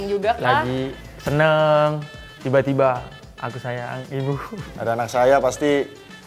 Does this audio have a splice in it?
yes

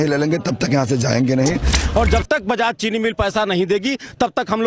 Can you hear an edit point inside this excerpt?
yes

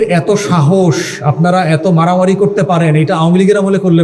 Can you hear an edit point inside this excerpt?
no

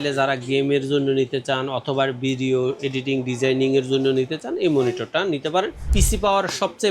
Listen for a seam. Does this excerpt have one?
yes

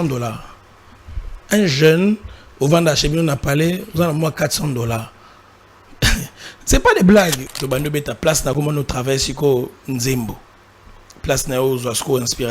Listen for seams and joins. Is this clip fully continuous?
no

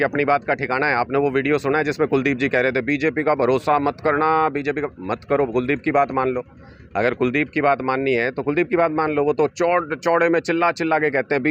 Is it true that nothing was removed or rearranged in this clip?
yes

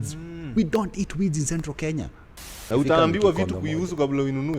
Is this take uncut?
no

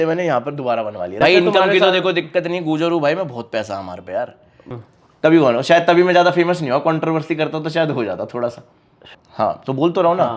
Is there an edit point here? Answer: yes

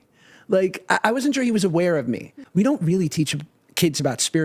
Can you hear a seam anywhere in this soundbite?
yes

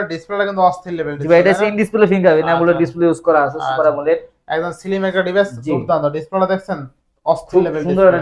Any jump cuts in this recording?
no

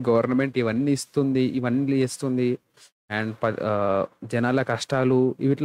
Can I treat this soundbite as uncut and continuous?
yes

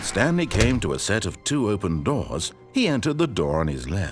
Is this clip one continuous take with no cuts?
yes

